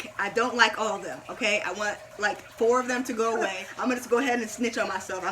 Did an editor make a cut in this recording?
yes; 1 cut; at 3.7 s

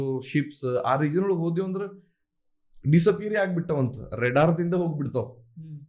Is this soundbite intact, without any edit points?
yes; 0 cuts

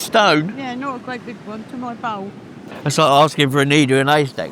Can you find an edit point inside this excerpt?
yes; 1 cut; at 2.7 s

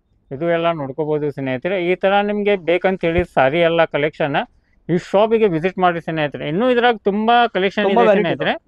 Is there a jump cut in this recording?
no; 0 cuts

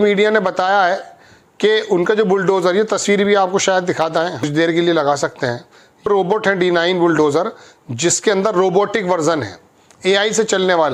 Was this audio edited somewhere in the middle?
no; 0 cuts

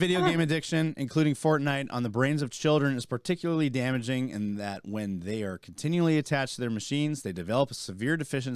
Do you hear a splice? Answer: no; 0 cuts

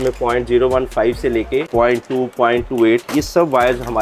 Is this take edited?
yes; 1 cut; at 1.7 s

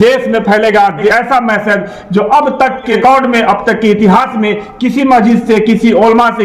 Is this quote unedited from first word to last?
no; 2 cuts; at 1.1 s, 3.0 s

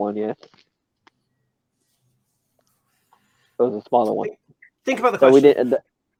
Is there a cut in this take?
no; 0 cuts

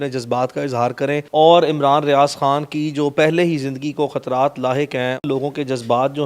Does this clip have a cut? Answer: yes; 2 cuts; at 1.3 s, 5.2 s

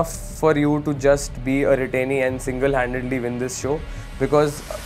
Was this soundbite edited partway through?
no; 0 cuts

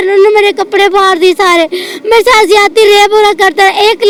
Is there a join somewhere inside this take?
no; 0 cuts

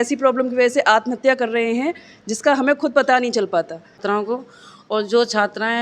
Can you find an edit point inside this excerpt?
yes; 1 cut; at 4.0 s

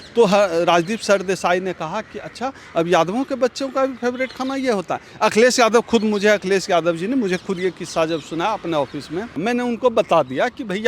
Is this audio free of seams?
no; 1 cut; at 9.3 s

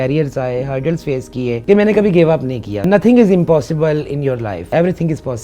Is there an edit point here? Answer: yes; 3 cuts; at 1.6 s, 2.9 s, 4.6 s

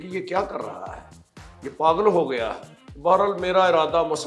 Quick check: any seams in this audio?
no; 0 cuts

